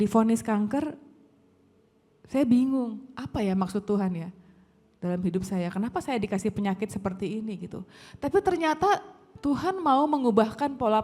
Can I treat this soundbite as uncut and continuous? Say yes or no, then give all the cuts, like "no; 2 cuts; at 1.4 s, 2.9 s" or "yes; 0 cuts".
yes; 0 cuts